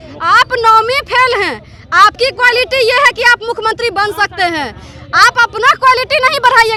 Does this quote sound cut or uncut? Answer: uncut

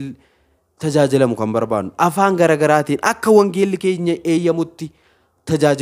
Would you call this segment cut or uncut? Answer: uncut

